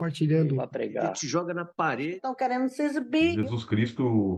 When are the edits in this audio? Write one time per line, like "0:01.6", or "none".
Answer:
none